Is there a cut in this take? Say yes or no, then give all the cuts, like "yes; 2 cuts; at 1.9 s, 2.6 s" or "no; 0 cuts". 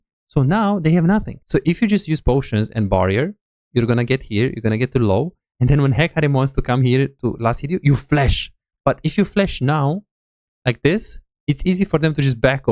yes; 1 cut; at 1.4 s